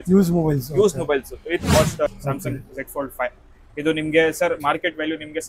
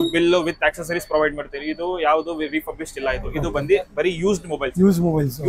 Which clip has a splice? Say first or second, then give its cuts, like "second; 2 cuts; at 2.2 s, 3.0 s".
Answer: first; 1 cut; at 2.1 s